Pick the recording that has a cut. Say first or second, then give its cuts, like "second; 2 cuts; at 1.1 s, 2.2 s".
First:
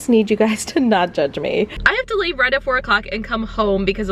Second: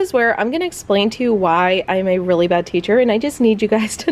first; 1 cut; at 1.8 s